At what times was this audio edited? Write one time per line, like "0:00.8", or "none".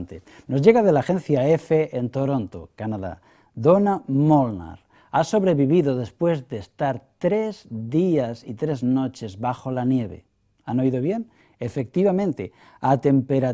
0:02.6